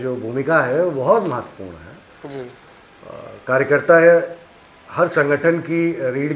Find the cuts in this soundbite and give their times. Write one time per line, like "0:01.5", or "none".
none